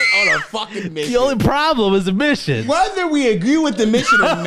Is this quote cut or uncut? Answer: cut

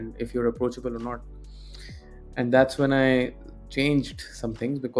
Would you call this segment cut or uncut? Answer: uncut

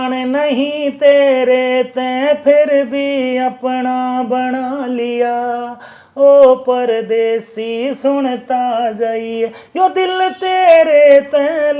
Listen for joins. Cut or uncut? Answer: uncut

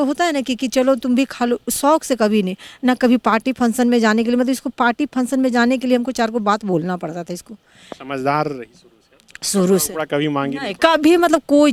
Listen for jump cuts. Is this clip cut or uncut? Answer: uncut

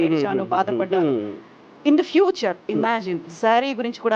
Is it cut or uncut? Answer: uncut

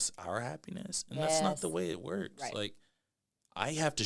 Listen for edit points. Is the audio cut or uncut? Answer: uncut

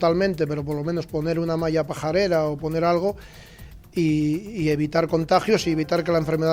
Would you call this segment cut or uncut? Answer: uncut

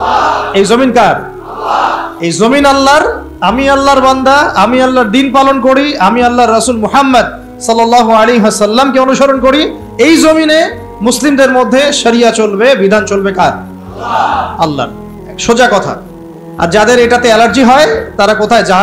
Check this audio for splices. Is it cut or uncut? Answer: uncut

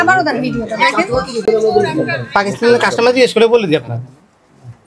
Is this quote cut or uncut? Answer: uncut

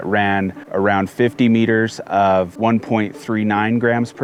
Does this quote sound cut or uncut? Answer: uncut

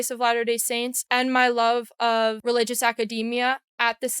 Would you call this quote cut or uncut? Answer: cut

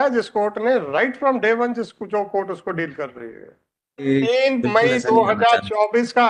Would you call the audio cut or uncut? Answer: cut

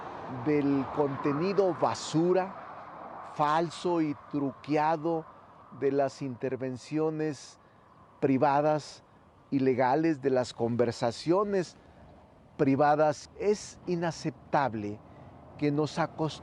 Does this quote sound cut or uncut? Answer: uncut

